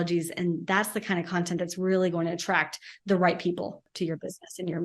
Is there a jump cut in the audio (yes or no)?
yes